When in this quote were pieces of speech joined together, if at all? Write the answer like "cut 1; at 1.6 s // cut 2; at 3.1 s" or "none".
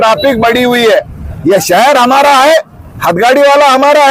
cut 1; at 1.3 s